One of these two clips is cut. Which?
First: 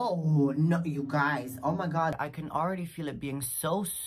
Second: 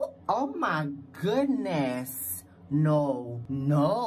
first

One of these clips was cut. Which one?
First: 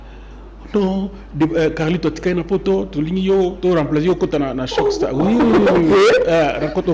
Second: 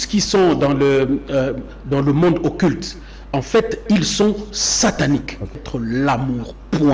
second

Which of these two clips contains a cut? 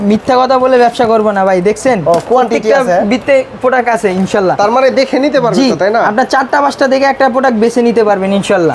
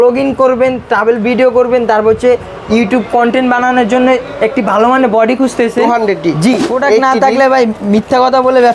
second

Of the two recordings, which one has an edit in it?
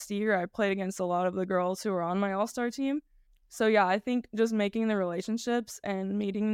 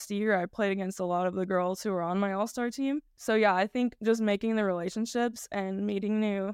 second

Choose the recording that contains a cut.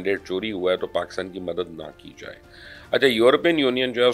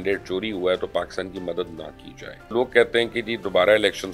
second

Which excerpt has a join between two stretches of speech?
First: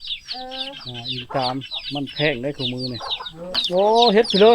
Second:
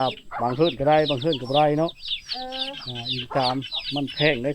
first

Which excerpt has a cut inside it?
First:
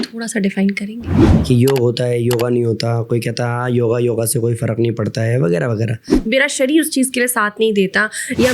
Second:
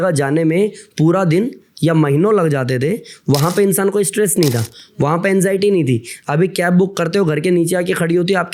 first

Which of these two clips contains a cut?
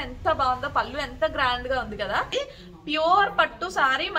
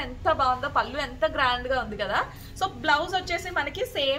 first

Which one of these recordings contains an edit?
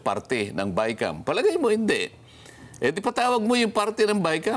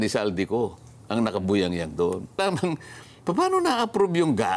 second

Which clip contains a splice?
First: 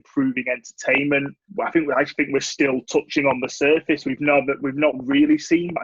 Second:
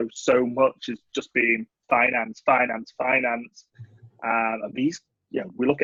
first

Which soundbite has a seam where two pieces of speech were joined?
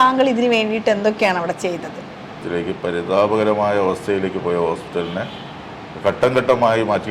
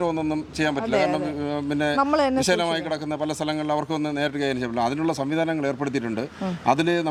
first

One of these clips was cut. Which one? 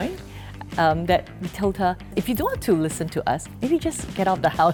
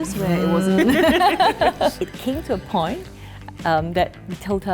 second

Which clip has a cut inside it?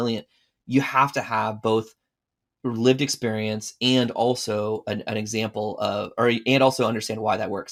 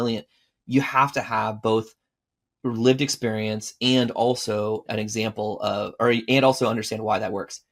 second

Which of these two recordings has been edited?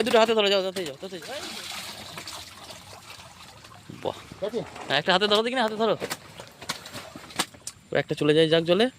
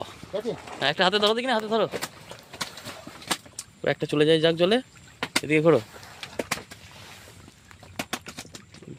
first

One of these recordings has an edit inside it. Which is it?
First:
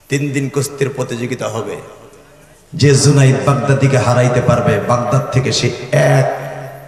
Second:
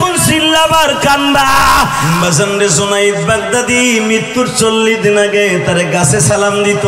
second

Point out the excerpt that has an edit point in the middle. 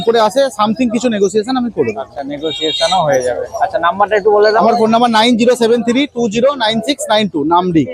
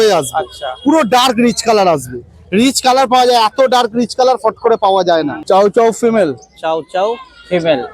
second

